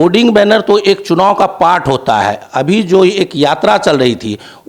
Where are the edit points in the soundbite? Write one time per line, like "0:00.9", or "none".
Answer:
none